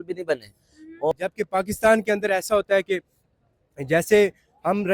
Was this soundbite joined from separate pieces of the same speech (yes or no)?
yes